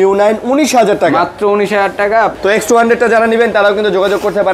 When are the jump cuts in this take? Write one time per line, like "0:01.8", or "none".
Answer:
0:02.3